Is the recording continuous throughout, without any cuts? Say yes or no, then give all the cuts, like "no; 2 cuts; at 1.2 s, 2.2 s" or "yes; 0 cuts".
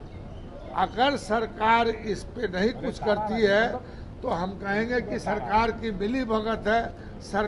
yes; 0 cuts